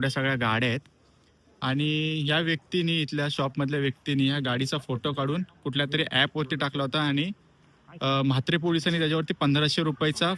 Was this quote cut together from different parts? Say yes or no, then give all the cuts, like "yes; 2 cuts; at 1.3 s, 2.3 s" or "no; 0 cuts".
no; 0 cuts